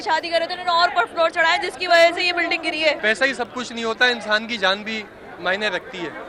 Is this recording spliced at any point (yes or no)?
yes